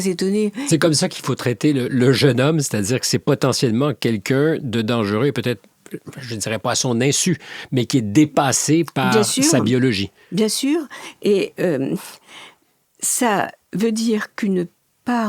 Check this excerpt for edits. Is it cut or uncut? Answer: uncut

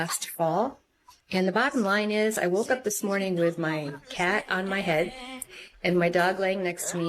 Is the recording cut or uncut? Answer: uncut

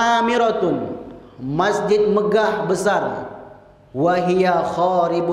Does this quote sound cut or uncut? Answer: uncut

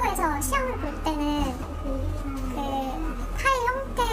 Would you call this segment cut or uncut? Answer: cut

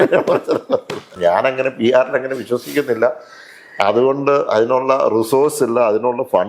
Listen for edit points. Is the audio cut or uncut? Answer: cut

